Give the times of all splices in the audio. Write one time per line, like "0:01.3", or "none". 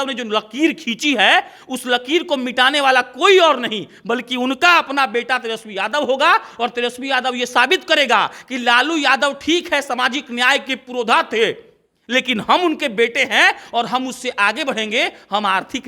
none